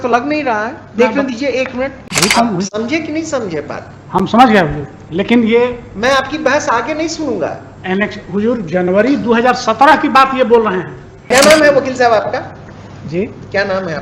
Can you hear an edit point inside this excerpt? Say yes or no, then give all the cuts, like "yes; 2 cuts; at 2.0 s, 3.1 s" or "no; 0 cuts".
yes; 2 cuts; at 2.0 s, 11.3 s